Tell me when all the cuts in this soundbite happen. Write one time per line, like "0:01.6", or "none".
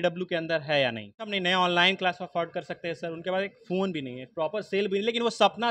0:01.3